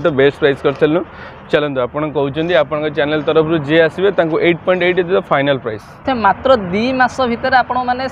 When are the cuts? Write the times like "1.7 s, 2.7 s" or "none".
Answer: 6.0 s